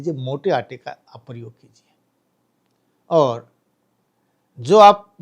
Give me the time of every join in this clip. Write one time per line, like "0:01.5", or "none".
none